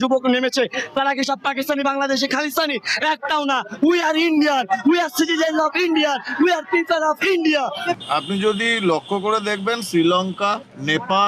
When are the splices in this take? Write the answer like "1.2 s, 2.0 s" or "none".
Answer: 7.9 s